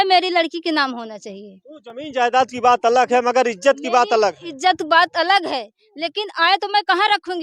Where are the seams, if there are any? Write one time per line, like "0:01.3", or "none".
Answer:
none